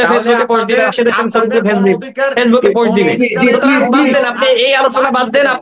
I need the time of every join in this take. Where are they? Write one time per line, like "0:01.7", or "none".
none